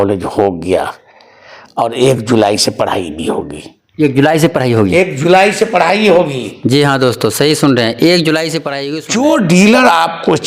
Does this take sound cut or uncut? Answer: cut